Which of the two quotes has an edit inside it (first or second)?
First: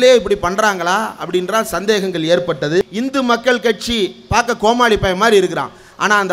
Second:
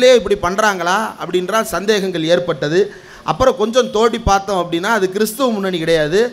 first